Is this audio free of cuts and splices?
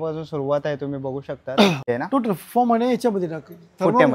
no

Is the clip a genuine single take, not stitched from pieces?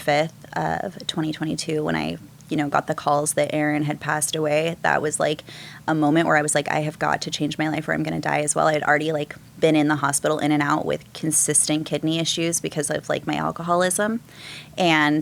yes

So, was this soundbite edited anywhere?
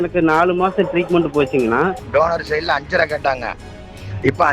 yes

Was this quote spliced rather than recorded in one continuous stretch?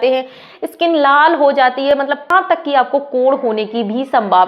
yes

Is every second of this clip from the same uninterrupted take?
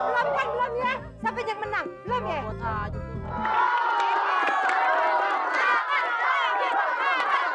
yes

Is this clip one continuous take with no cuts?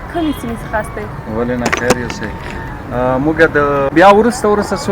no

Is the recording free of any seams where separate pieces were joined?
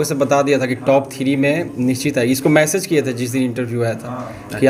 yes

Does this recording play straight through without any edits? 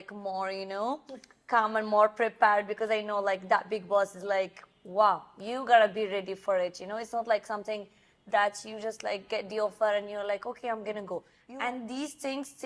no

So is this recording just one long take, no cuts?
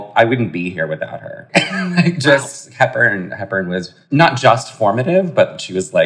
no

